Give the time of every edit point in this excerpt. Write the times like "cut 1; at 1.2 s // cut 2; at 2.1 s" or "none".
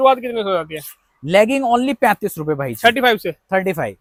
none